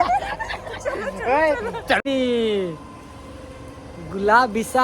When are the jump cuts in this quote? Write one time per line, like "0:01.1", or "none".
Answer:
0:02.0